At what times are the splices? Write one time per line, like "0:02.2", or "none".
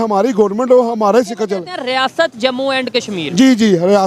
none